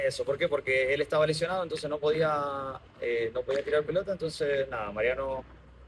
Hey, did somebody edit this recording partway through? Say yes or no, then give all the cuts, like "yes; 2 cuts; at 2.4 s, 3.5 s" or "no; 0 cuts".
no; 0 cuts